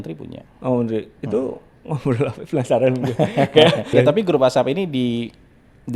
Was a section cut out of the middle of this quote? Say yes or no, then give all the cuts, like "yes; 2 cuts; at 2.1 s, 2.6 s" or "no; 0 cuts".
yes; 1 cut; at 3.9 s